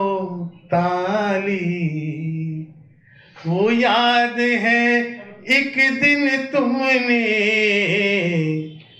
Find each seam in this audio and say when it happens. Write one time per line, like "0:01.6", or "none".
none